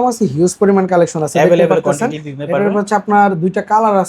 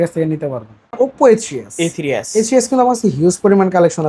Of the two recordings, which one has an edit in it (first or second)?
second